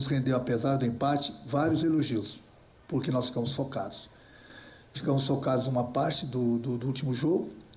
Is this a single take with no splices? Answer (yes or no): yes